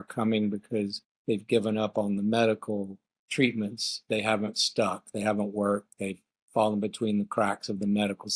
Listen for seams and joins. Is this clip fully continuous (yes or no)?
no